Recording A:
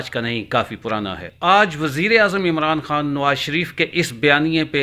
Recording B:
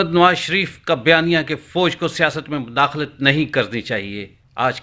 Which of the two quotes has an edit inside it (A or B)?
A